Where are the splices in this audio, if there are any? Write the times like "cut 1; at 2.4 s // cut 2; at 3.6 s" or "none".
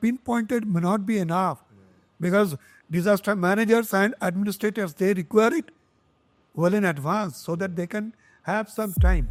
none